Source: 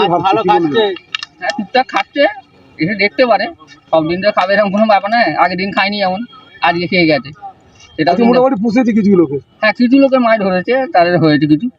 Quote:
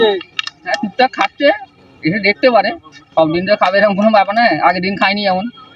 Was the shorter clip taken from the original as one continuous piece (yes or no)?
yes